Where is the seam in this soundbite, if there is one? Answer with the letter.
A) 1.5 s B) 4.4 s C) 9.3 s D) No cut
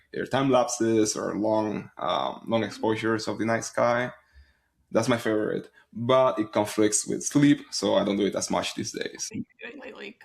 C